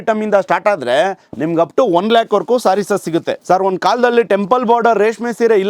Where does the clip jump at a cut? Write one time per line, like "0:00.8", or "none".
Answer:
0:03.3

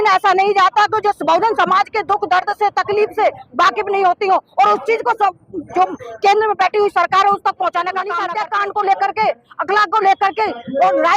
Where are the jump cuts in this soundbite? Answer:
0:08.2

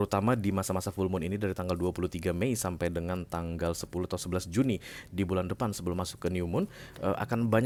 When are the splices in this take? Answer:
none

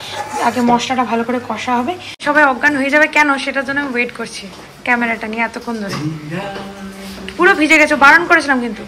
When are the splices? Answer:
0:02.2

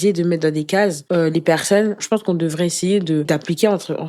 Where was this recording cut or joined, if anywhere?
0:01.0
0:02.0
0:03.3

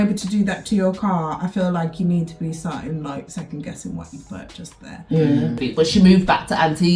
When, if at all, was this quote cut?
0:05.6

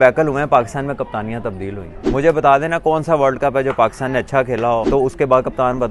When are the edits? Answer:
0:01.9
0:04.9

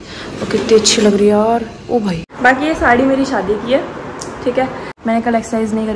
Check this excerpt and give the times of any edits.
0:02.3
0:04.9

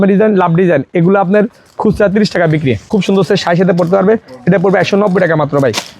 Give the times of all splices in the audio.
0:02.8

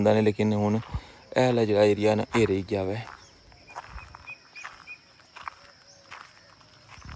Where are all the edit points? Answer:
none

